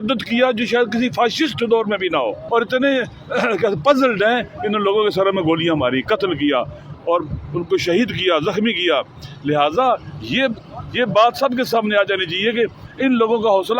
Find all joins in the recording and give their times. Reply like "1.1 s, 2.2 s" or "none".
2.4 s